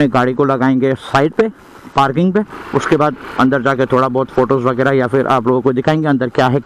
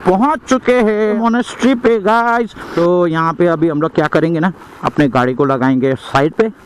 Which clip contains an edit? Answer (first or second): second